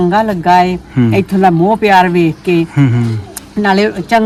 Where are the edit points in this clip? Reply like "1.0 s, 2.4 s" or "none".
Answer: none